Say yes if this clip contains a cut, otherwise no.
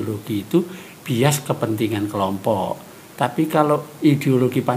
no